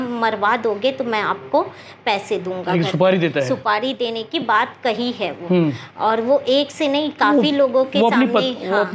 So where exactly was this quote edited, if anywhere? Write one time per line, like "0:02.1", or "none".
none